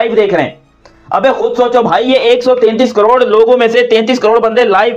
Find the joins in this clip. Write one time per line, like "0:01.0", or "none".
0:01.0